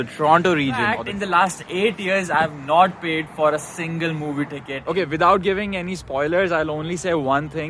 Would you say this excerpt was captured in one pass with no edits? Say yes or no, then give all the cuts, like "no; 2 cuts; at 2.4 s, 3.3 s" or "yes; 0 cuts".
no; 2 cuts; at 1.1 s, 4.8 s